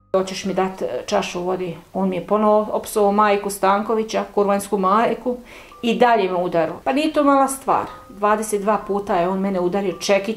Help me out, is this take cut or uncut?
cut